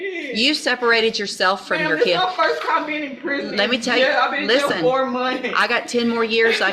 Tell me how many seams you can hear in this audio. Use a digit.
0